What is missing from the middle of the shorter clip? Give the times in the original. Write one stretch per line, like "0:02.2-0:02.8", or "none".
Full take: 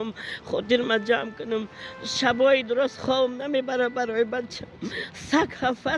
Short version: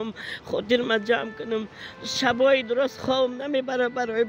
none